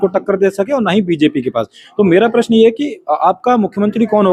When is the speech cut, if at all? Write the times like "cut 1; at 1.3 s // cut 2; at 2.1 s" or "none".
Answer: none